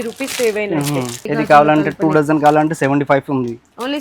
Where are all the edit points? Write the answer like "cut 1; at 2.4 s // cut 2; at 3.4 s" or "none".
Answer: cut 1; at 1.2 s